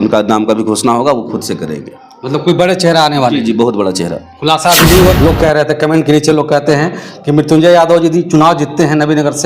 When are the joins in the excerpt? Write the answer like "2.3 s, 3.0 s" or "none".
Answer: 5.1 s